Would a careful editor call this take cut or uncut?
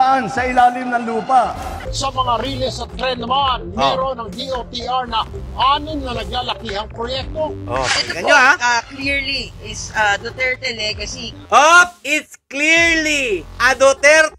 cut